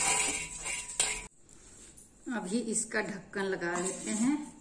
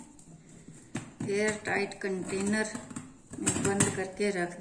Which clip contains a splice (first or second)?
first